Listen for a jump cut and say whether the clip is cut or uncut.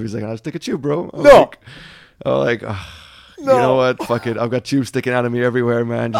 uncut